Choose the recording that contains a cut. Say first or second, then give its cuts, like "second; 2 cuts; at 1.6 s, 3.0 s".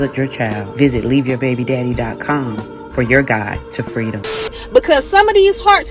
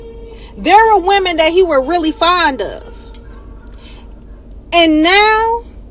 first; 1 cut; at 4.5 s